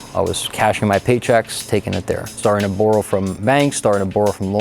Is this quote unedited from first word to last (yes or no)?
no